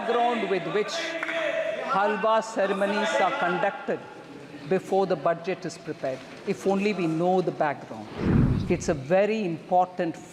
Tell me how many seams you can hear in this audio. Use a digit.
1